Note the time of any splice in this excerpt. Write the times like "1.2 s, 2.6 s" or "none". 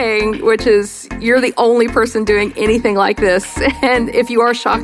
none